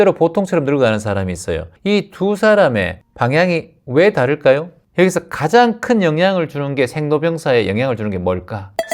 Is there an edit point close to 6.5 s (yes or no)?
no